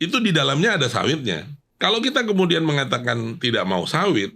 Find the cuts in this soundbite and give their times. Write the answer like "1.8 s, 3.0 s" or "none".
1.6 s